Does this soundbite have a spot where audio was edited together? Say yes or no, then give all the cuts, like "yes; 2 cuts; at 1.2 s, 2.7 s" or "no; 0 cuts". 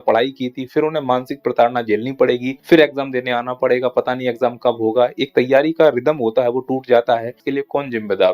yes; 2 cuts; at 2.5 s, 7.4 s